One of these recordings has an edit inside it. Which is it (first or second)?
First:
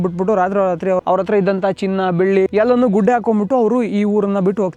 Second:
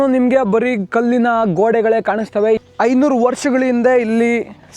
second